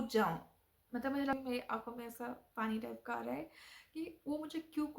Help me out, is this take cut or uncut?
cut